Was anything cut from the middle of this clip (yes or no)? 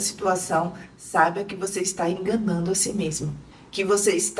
no